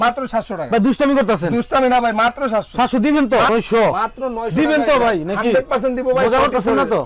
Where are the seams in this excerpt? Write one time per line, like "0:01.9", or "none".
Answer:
0:03.5

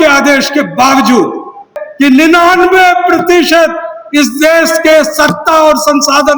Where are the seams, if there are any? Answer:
0:01.8

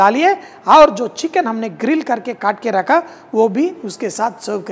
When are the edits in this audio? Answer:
none

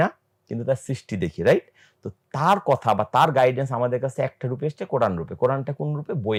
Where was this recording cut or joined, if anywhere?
none

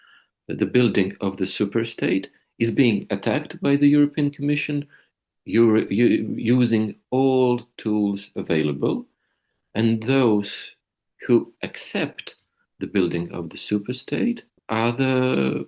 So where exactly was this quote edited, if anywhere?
0:14.5

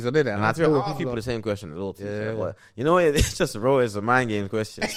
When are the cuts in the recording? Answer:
none

